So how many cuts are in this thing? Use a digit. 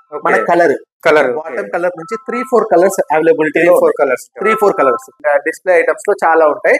1